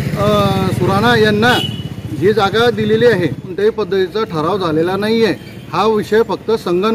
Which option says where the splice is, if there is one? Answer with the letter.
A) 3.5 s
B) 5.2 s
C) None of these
A